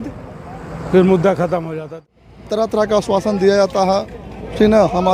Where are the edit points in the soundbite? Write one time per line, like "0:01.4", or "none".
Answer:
0:02.0

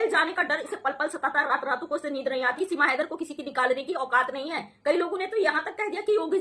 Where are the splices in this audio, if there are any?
0:02.6

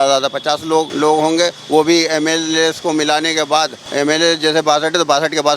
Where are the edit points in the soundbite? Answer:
0:00.9
0:03.8

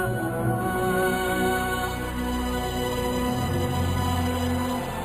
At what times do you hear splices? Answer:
none

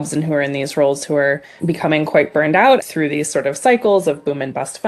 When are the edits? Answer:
0:01.5
0:02.8

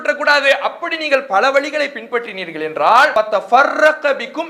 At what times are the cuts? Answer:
0:03.1

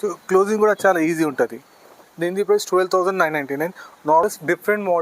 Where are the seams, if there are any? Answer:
0:01.7
0:04.2

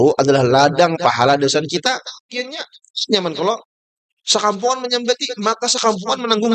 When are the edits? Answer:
0:02.2

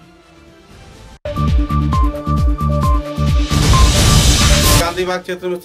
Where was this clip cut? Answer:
none

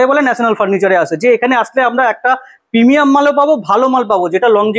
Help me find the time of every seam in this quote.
none

